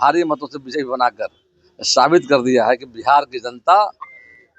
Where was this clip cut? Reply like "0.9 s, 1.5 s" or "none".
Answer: none